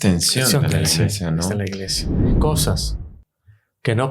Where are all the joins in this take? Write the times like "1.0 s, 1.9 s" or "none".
2.3 s